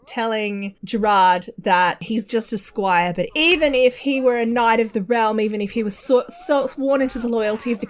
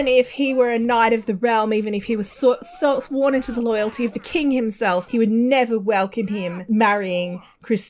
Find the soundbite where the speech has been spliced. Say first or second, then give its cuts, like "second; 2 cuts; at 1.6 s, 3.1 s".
first; 1 cut; at 2.0 s